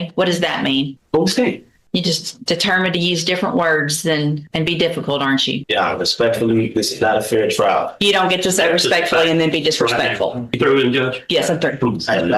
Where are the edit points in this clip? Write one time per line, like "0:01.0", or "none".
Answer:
0:01.0
0:01.7
0:04.4
0:05.6
0:10.5